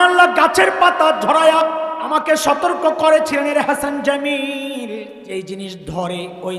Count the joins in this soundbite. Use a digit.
2